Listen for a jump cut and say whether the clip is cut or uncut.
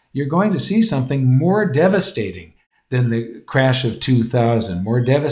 uncut